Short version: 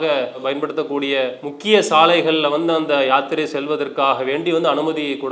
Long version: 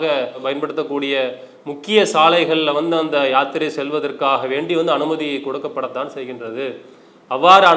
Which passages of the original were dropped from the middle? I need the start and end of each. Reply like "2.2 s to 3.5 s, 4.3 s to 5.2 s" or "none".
1.5 s to 1.7 s